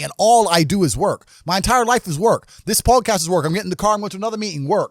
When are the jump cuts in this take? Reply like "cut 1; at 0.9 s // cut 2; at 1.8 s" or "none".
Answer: none